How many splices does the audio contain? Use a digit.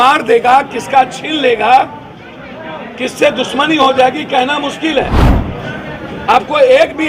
1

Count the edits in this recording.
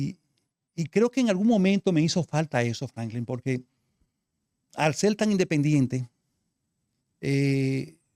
0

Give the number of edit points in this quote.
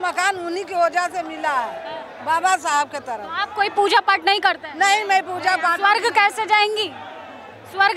0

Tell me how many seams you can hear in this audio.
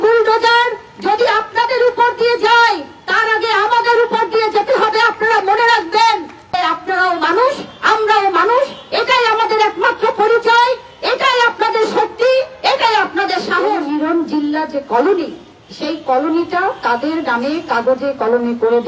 2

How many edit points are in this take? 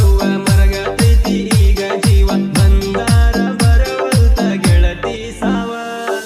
2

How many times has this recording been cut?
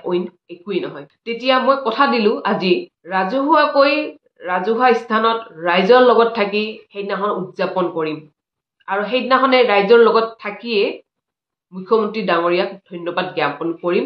2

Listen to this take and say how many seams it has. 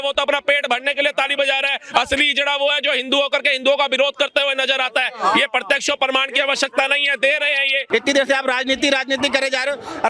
1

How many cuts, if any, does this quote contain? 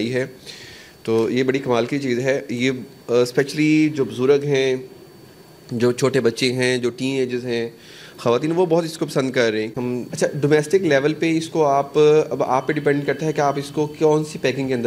1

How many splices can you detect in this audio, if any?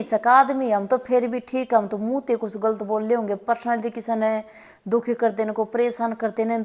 0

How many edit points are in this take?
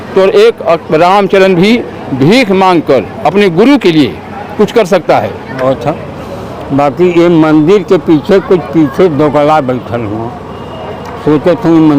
1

